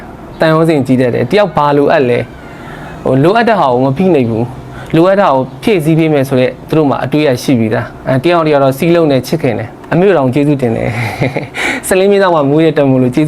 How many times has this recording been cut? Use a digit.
1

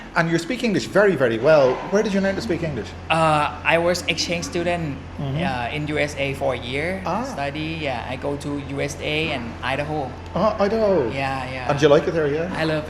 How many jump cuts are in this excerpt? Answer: 1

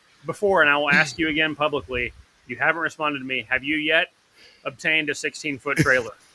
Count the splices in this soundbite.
0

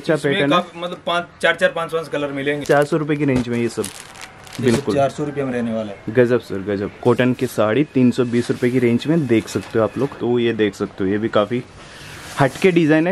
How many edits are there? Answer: 3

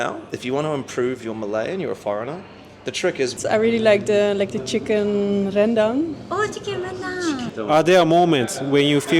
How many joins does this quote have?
2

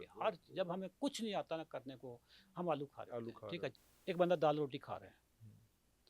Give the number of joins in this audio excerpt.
1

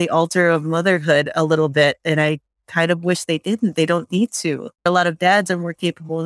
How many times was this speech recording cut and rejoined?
1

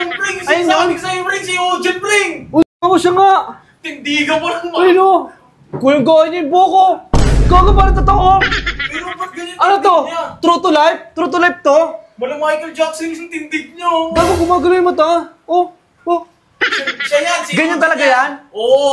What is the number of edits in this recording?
0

